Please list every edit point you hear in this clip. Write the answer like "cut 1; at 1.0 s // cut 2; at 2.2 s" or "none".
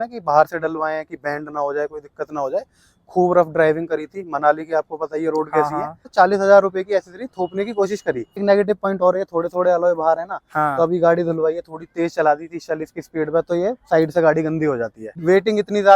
cut 1; at 6.1 s // cut 2; at 8.4 s // cut 3; at 15.0 s